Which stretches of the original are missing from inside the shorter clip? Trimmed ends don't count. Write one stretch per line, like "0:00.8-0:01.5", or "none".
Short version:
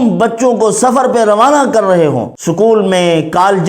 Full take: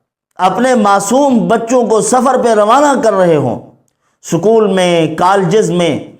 0:03.6-0:04.2